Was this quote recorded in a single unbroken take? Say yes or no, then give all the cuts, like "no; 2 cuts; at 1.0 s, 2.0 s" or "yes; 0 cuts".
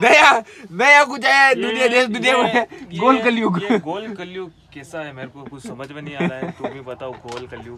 yes; 0 cuts